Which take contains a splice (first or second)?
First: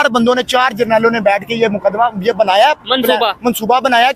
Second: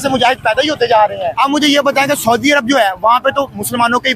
second